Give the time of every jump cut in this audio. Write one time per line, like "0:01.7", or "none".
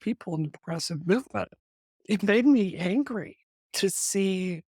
0:01.6